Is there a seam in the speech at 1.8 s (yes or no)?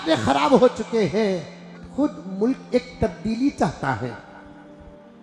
yes